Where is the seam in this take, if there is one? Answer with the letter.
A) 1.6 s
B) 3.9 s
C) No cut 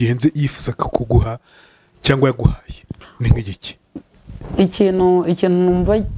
C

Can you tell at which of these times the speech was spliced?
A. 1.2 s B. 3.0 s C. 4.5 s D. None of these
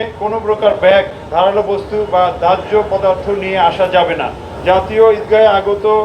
C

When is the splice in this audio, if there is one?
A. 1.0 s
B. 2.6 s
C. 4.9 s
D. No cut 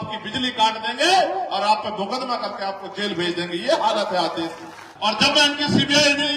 C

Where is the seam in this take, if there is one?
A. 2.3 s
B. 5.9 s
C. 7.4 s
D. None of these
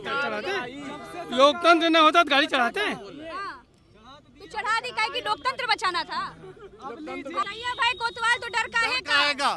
C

